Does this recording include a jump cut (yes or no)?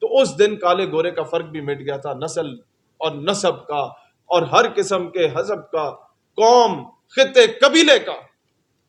no